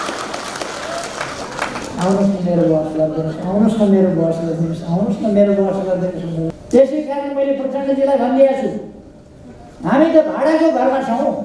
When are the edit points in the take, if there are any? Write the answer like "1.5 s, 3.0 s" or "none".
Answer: 6.6 s